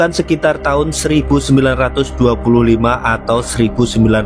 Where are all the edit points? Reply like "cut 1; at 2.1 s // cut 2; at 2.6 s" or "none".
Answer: none